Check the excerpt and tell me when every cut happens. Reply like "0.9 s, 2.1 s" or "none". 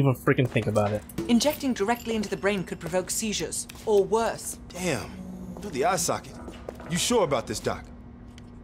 4.6 s